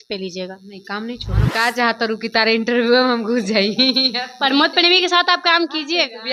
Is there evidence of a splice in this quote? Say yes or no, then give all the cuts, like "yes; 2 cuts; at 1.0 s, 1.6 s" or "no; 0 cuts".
yes; 1 cut; at 1.4 s